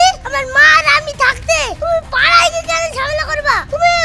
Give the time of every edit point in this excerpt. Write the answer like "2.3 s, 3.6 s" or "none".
none